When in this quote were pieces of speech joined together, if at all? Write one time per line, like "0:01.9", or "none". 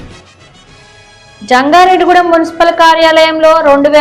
0:01.2